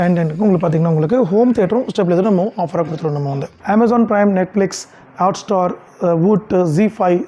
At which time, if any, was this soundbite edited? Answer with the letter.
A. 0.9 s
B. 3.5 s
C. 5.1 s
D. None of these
B